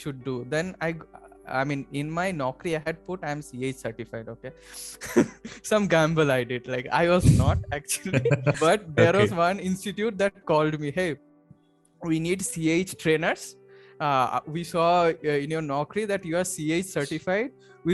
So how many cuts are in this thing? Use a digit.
1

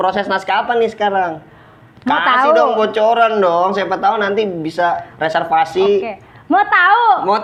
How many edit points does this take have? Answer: 0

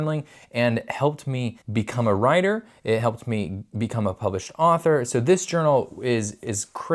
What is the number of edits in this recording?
1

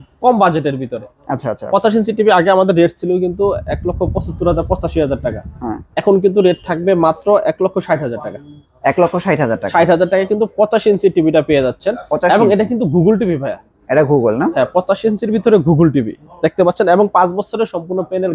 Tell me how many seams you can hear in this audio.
0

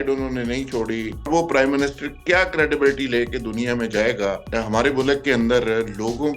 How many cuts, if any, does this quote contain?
2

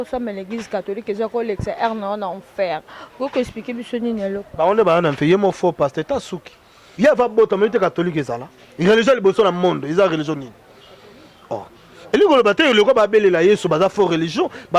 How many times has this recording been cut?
1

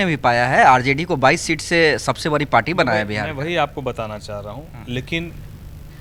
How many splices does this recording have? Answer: 0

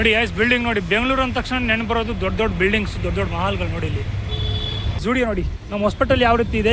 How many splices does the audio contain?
1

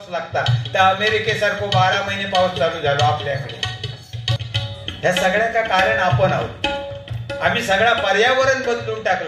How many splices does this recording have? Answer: 1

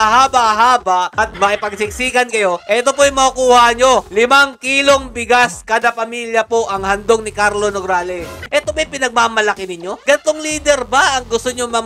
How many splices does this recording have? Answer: 1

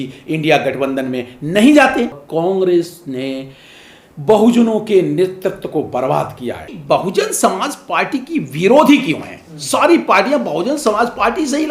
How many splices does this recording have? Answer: 2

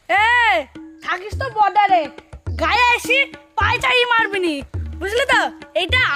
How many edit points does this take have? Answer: 0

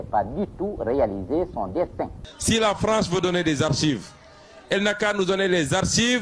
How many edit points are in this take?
1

